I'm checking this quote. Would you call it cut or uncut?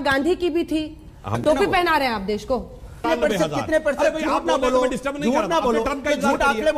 cut